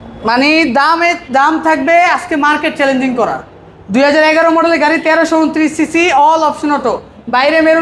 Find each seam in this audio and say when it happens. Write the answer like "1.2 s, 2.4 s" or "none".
none